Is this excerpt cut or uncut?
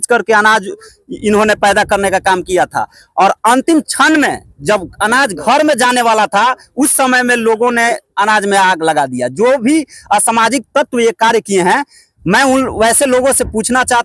uncut